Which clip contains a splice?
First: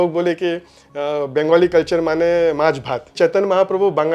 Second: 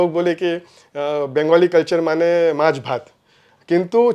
first; 1 cut; at 3.1 s

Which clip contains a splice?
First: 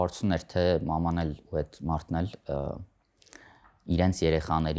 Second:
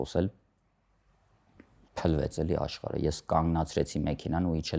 second; 1 cut; at 1.9 s

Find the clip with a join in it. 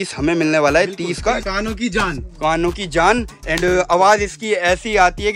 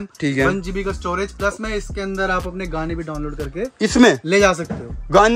first; 1 cut; at 1.4 s

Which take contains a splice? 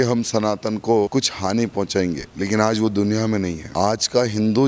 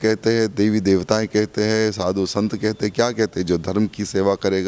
first; 3 cuts; at 1.1 s, 2.3 s, 3.6 s

